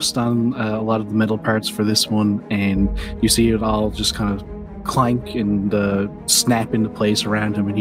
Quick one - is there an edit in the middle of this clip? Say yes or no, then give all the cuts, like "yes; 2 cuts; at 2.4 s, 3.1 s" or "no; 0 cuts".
no; 0 cuts